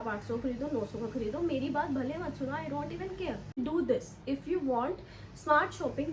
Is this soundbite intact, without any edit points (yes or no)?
no